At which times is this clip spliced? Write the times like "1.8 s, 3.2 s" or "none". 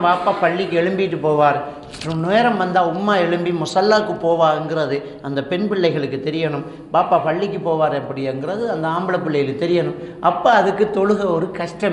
none

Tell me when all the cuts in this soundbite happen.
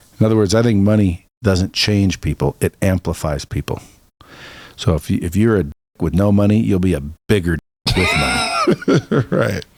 none

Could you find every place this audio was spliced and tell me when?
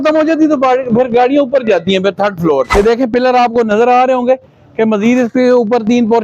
2.7 s

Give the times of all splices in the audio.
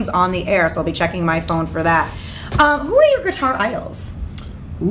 none

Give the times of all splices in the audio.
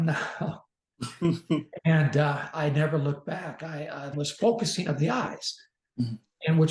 4.1 s

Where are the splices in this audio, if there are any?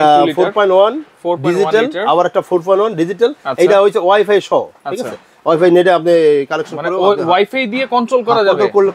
none

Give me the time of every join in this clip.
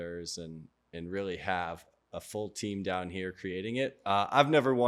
none

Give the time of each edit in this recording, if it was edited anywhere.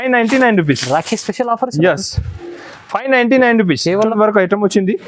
4.1 s

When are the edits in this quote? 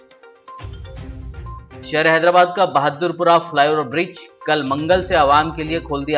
1.4 s

